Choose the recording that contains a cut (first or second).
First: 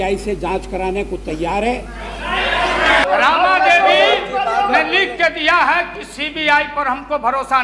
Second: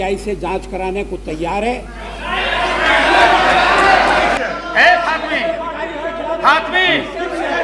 first